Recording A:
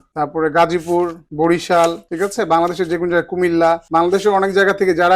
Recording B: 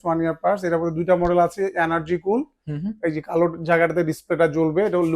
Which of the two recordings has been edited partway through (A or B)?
A